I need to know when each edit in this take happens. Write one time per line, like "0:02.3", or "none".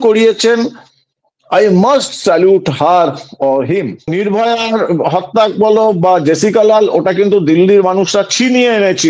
0:04.1